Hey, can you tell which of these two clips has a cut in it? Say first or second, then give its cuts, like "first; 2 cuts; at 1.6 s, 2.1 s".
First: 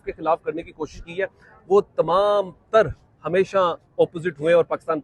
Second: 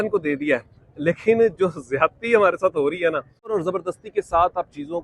second; 1 cut; at 3.5 s